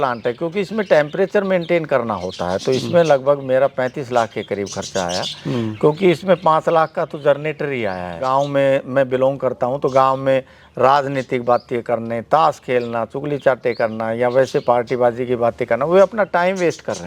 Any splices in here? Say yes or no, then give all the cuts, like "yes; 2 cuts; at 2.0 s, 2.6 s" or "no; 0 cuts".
yes; 1 cut; at 8.2 s